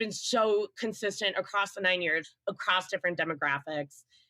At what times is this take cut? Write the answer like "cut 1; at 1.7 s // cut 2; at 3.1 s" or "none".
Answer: cut 1; at 2.3 s